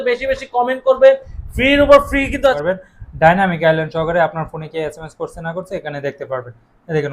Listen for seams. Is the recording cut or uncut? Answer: cut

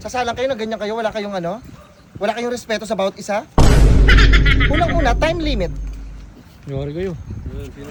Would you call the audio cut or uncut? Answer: uncut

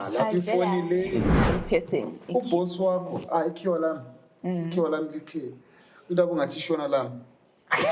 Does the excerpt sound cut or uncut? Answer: cut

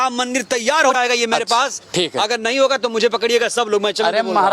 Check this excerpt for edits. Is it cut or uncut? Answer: cut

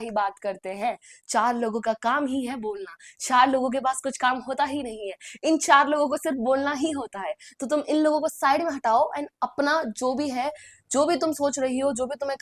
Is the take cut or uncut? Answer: uncut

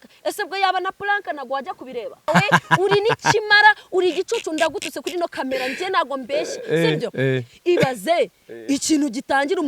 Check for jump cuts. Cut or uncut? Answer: cut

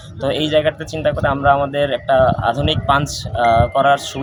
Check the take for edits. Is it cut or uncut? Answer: uncut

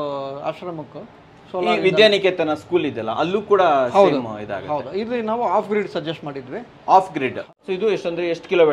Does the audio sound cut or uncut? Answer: cut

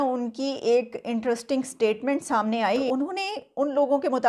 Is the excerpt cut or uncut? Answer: cut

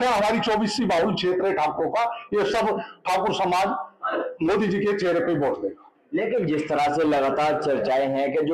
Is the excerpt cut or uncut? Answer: uncut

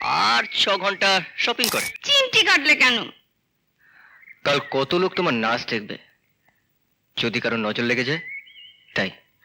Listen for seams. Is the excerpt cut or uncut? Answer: cut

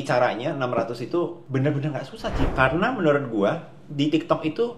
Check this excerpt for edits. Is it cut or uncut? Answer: cut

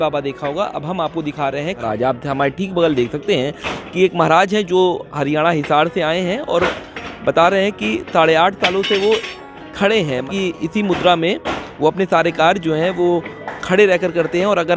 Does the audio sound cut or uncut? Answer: cut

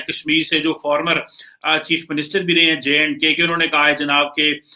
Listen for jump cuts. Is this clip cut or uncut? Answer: uncut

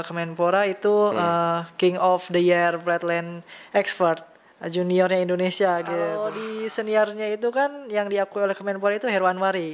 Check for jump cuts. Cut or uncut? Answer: cut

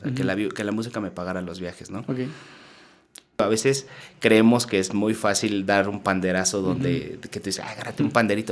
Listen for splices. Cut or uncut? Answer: cut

